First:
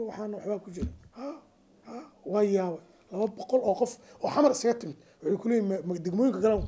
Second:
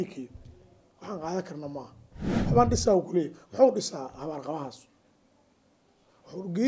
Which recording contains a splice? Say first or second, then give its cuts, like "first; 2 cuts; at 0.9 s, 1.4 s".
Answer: second; 1 cut; at 2.4 s